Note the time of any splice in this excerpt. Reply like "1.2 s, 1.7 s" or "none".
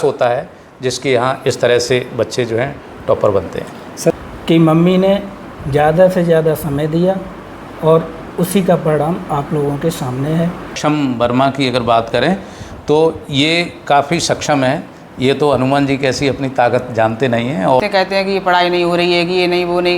4.1 s, 10.8 s, 17.8 s